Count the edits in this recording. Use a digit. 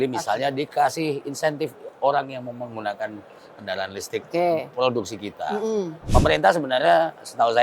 1